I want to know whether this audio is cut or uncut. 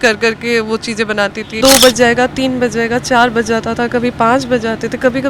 cut